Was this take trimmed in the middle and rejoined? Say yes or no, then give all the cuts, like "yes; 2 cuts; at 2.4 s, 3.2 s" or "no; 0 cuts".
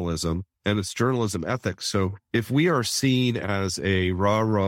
yes; 1 cut; at 2.3 s